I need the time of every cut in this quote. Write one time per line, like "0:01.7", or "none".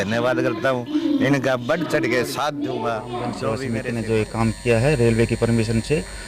0:03.8